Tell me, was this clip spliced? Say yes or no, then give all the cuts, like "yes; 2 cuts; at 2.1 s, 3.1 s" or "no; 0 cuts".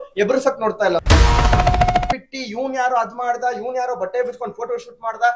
no; 0 cuts